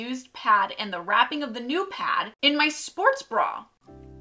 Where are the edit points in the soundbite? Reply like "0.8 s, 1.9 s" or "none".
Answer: 2.3 s